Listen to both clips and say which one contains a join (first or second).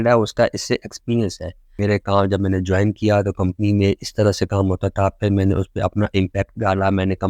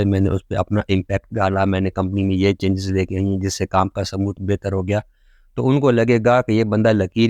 first